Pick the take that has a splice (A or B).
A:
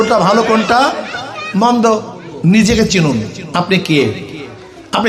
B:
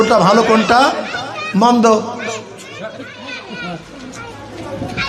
A